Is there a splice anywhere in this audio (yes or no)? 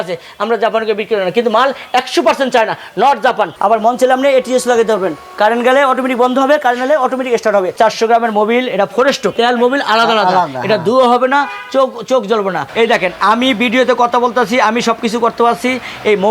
yes